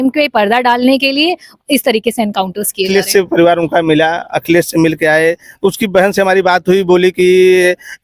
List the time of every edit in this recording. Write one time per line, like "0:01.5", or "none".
0:02.9